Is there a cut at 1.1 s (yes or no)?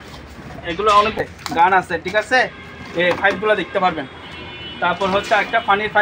yes